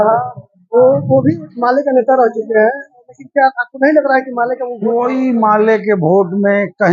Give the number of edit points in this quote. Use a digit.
1